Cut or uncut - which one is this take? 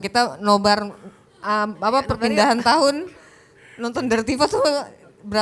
uncut